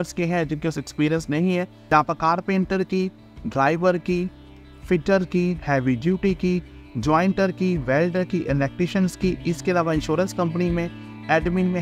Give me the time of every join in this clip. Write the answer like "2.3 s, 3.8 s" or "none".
1.8 s